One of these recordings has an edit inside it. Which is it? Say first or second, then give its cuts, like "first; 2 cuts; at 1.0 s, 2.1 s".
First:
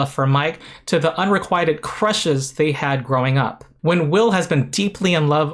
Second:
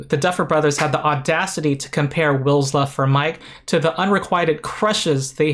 first; 1 cut; at 3.6 s